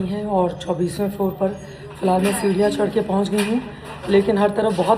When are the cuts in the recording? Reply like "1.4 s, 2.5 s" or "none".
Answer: none